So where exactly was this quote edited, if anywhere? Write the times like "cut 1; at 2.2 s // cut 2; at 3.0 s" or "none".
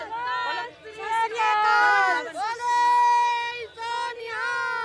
none